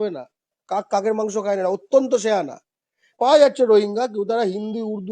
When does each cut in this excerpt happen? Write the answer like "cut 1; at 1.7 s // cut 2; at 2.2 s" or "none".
cut 1; at 3.1 s